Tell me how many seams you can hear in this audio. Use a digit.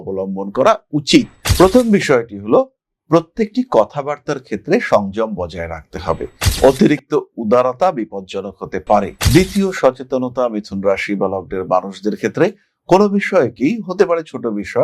2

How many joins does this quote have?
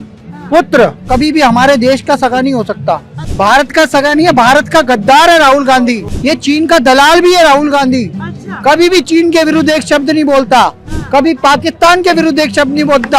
3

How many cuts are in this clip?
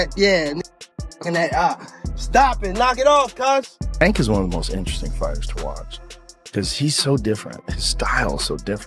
1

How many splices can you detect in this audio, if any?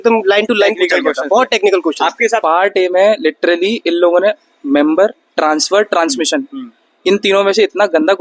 1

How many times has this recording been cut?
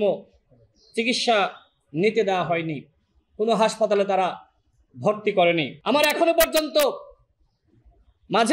1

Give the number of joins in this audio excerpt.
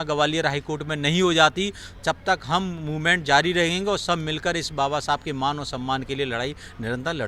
0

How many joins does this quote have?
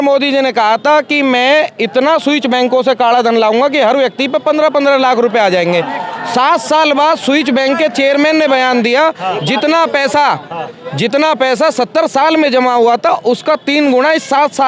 0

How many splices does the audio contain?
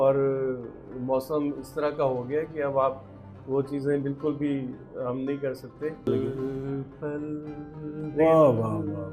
1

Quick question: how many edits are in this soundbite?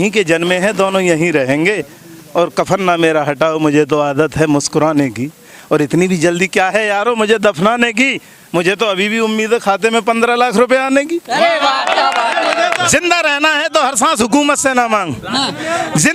1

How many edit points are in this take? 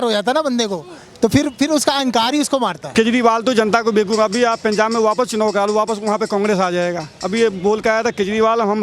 1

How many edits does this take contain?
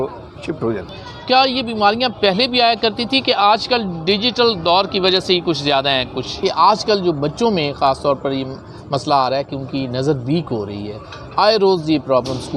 2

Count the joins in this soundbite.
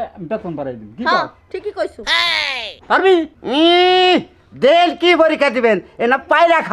1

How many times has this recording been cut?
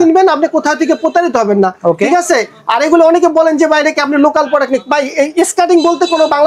0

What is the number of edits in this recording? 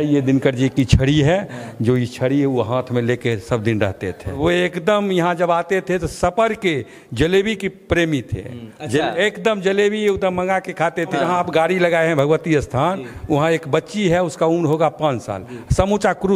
2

